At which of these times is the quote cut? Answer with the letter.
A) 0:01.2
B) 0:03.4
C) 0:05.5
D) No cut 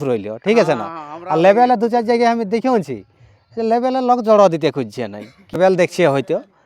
C